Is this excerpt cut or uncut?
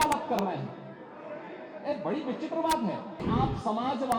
cut